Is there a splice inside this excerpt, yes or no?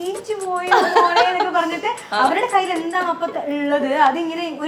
no